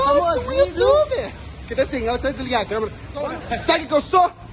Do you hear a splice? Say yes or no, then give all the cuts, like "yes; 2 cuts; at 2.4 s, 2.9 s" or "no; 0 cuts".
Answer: yes; 1 cut; at 3.4 s